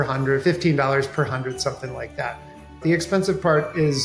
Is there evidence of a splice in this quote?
yes; 1 cut; at 2.7 s

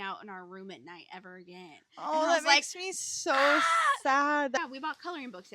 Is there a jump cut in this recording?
yes; 1 cut; at 4.6 s

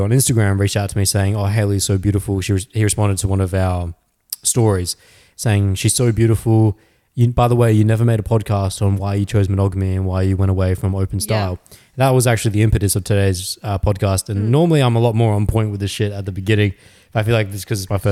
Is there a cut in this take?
no; 0 cuts

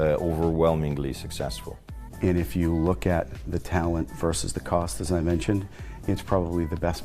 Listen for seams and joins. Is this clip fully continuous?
no; 1 cut; at 2.0 s

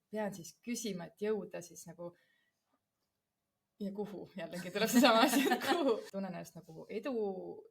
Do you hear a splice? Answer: yes; 1 cut; at 6.1 s

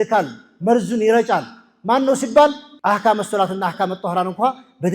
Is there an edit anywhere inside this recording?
yes; 1 cut; at 2.7 s

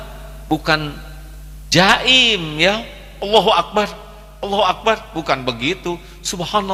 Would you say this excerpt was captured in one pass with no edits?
yes; 0 cuts

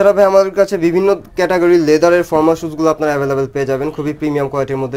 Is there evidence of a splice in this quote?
no; 0 cuts

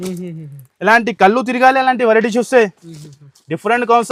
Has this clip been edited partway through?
no; 0 cuts

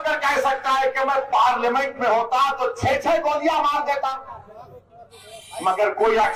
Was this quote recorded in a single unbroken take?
yes; 0 cuts

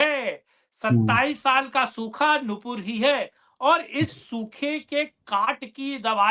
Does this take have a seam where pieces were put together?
no; 0 cuts

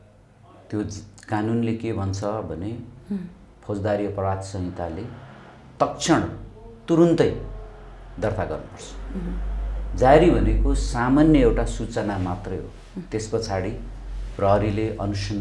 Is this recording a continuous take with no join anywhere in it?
yes; 0 cuts

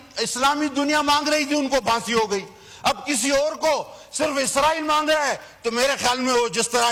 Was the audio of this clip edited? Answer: no; 0 cuts

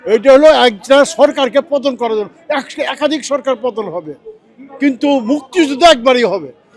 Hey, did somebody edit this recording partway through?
no; 0 cuts

